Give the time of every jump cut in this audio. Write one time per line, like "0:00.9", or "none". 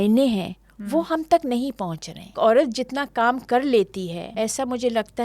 0:02.3
0:04.3